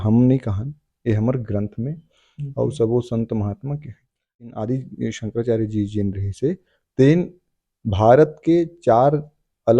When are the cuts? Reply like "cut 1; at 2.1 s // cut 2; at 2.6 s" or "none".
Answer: cut 1; at 4.4 s